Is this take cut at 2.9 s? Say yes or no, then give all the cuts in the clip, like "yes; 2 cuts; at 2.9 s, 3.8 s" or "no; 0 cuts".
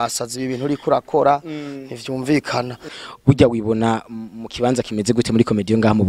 yes; 1 cut; at 2.9 s